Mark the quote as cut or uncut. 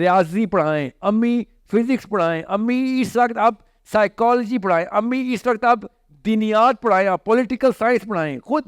uncut